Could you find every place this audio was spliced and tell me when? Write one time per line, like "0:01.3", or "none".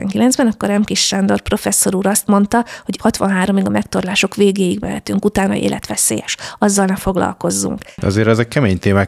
0:02.9
0:08.0